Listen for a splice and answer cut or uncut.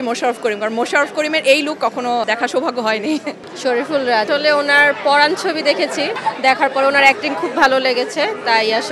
cut